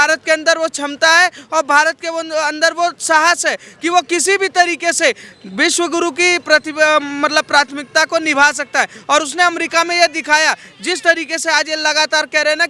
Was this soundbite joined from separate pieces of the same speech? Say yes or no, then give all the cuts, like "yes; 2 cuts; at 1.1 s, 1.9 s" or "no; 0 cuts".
no; 0 cuts